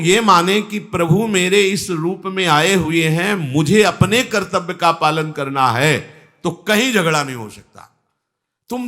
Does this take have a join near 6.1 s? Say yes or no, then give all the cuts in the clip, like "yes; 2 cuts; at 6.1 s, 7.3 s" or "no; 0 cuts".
no; 0 cuts